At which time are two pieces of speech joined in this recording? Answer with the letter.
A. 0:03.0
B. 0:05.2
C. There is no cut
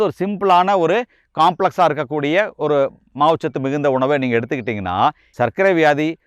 B